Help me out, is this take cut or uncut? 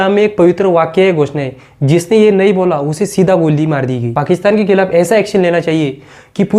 cut